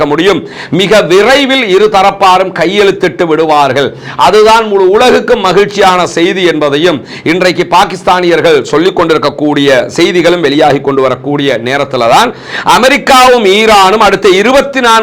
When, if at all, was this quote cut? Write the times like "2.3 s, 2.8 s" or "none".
none